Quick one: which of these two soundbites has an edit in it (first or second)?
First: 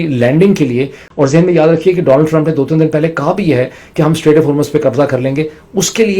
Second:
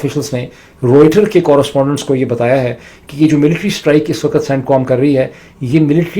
first